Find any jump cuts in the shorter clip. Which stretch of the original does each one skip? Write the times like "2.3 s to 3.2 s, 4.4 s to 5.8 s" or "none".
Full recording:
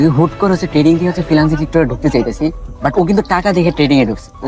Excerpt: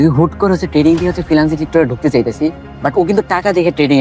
none